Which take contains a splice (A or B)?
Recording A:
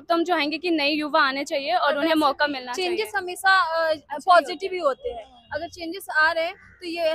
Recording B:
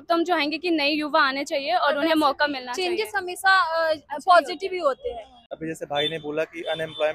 B